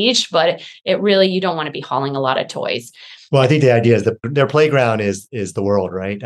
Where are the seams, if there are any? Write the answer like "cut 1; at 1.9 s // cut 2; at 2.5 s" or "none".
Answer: cut 1; at 4.3 s